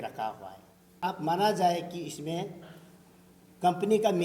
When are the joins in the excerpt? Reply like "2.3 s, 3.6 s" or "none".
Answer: 1.0 s